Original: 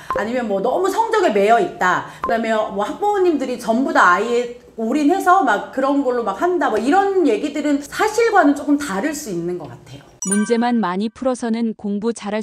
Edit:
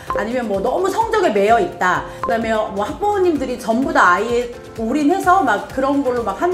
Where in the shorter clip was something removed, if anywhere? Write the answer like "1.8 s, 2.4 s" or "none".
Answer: none